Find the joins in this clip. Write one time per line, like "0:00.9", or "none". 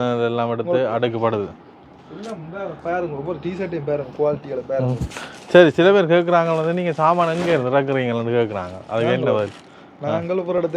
none